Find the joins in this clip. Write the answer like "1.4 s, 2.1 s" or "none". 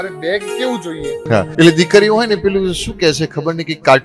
1.4 s